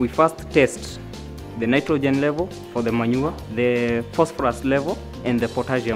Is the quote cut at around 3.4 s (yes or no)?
yes